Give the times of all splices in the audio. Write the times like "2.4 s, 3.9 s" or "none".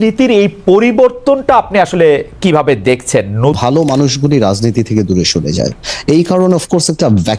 3.6 s

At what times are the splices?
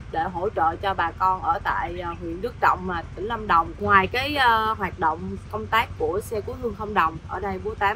3.7 s

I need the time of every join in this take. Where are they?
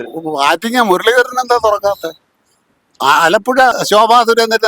3.8 s

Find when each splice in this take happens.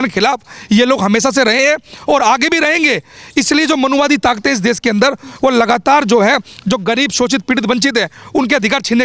none

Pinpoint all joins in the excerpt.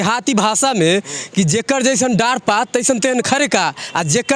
none

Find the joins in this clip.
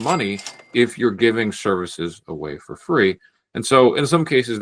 none

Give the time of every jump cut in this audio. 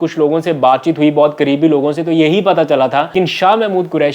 3.1 s

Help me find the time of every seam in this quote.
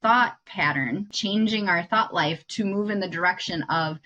1.1 s

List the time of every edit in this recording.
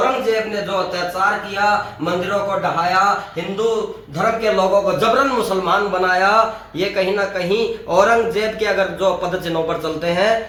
none

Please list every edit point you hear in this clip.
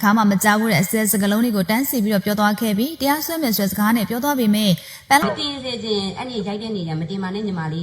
5.2 s

